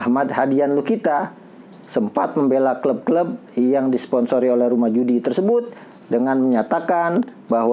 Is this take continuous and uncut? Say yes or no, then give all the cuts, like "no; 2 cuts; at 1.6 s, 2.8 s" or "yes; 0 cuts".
yes; 0 cuts